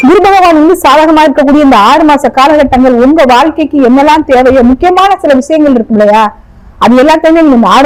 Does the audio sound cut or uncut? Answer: uncut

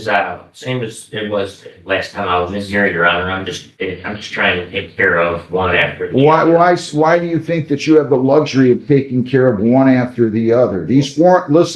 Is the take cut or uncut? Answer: cut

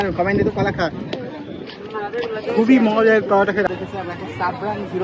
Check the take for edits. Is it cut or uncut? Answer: cut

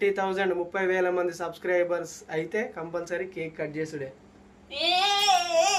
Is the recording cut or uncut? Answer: uncut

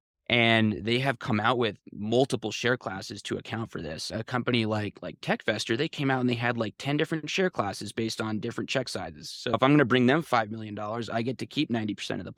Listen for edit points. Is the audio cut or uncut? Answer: uncut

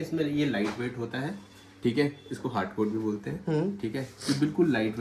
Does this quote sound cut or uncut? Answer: uncut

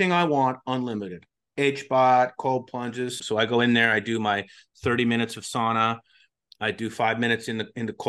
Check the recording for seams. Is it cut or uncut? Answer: cut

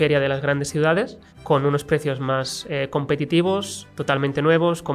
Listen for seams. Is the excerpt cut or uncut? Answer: uncut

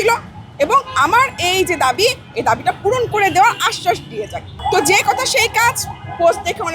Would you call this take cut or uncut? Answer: cut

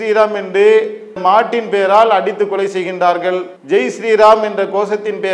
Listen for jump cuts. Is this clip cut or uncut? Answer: uncut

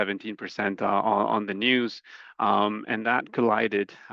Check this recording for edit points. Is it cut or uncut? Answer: uncut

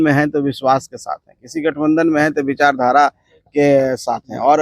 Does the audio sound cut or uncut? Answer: uncut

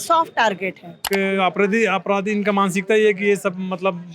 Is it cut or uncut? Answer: cut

